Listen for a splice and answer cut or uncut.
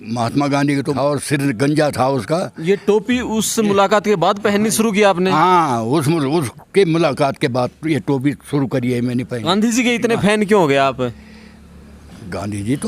cut